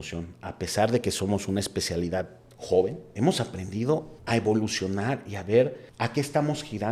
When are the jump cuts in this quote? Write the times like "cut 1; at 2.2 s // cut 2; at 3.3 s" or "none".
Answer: cut 1; at 3.0 s // cut 2; at 4.1 s // cut 3; at 5.8 s